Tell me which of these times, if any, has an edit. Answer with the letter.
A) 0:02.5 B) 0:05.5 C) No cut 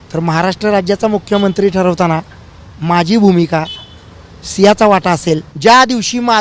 B